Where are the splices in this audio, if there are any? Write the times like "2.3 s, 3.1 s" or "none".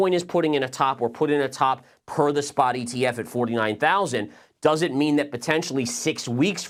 none